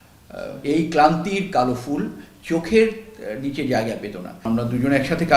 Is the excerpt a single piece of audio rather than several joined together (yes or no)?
no